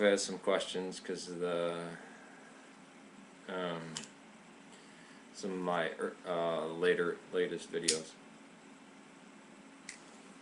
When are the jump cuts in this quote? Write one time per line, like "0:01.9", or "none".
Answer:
0:06.3